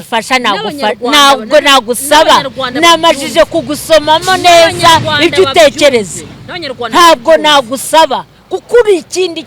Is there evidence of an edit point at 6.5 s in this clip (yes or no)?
no